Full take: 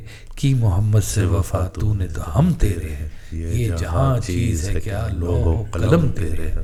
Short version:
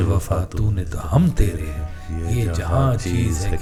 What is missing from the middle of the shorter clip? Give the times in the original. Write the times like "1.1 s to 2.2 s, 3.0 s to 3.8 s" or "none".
none

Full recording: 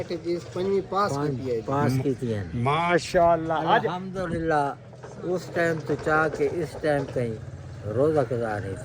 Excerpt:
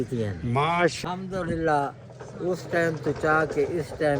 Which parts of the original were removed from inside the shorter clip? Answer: 3.1 s to 3.8 s

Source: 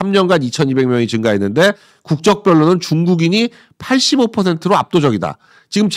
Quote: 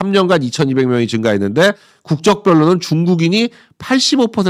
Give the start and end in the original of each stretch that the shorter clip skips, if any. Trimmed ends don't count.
none

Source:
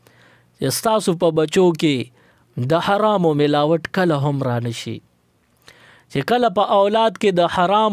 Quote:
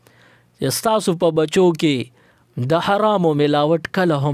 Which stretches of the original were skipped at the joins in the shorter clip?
none

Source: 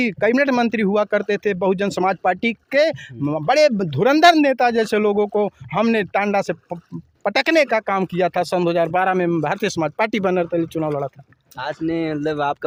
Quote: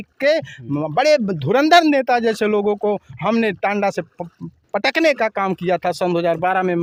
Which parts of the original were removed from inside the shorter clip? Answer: none

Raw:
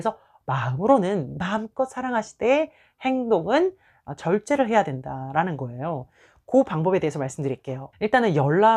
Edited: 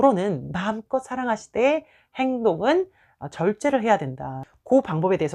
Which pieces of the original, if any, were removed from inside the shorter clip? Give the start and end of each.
5.2 s to 6.1 s

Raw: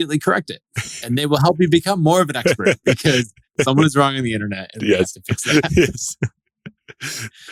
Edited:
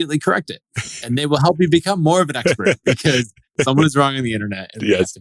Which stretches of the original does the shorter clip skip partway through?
none

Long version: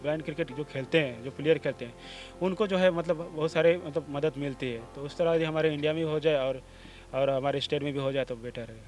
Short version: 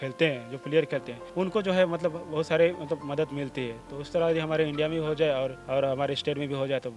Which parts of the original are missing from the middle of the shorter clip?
1.9 s to 2.2 s, 6.6 s to 7.0 s

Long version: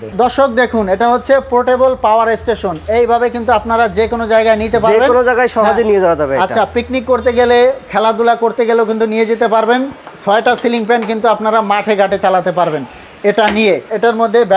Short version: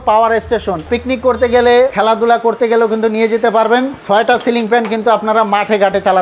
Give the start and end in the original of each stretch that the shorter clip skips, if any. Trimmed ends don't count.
2.8 s to 6.7 s, 7.8 s to 7.9 s, 9.9 s to 10.1 s

